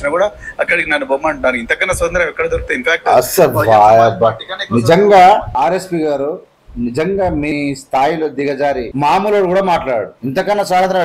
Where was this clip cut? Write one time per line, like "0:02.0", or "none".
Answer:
0:05.5
0:07.5
0:08.9
0:10.2